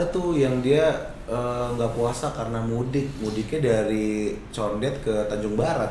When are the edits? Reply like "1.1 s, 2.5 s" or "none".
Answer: none

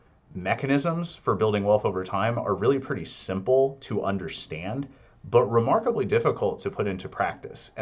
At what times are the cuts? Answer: none

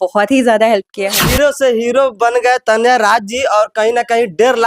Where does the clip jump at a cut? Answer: 1.2 s

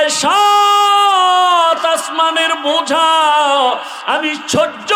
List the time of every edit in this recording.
none

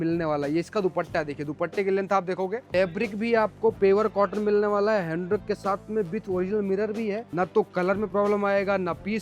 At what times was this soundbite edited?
2.7 s, 7.2 s

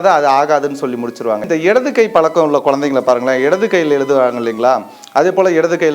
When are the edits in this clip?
1.4 s

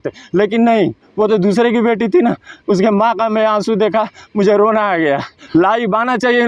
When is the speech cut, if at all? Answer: 5.4 s

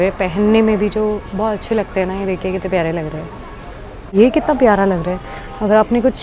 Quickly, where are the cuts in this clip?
4.1 s

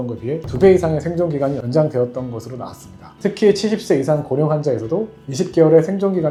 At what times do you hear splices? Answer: none

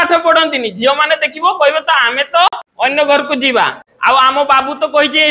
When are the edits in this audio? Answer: 2.6 s

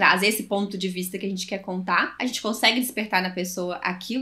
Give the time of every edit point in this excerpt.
2.1 s

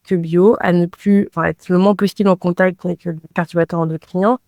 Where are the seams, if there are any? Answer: 3.3 s

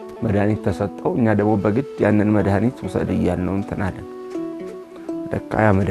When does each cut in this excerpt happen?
none

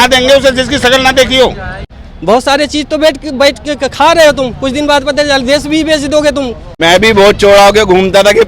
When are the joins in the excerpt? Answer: 2.1 s, 6.6 s

